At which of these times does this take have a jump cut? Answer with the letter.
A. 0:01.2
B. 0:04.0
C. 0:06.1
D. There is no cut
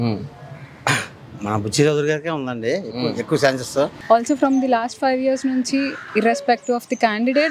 B